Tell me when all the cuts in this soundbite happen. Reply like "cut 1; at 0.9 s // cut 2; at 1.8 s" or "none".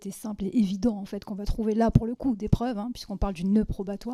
none